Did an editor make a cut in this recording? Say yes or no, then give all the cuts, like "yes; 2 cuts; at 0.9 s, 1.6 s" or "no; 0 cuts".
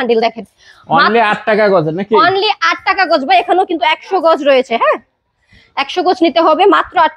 no; 0 cuts